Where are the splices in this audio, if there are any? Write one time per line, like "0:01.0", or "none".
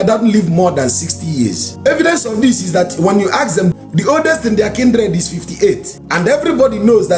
0:01.7
0:03.8
0:05.9